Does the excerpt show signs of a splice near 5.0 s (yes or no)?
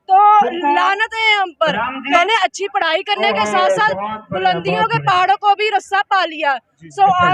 no